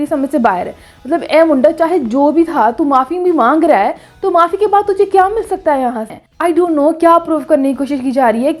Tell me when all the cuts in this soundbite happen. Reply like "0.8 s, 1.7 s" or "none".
6.2 s